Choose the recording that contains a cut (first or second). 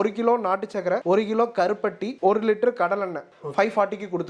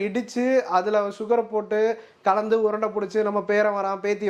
first